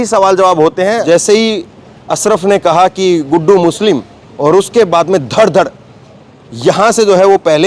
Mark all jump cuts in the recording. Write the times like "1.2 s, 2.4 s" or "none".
1.0 s